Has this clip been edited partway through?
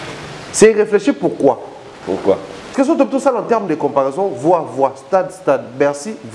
yes; 1 cut; at 2.7 s

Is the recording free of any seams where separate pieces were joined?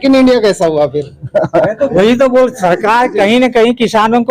no; 1 cut; at 1.9 s

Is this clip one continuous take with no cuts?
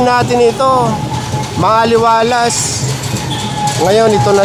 yes; 0 cuts

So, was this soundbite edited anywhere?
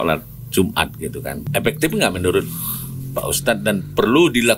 yes; 1 cut; at 1.4 s

